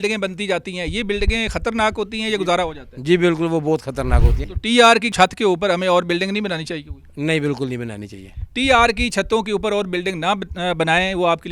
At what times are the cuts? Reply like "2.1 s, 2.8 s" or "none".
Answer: 4.4 s